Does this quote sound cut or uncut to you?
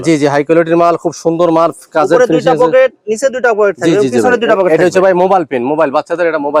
uncut